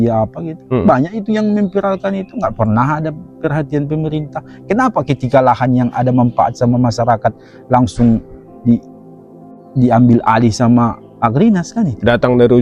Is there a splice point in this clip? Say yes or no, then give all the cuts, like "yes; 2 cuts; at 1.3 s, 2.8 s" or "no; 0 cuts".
no; 0 cuts